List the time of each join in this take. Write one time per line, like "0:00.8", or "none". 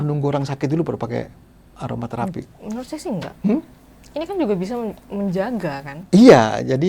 none